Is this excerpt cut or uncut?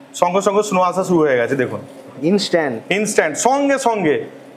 uncut